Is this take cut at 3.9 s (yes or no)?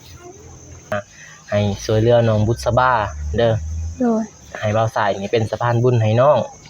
no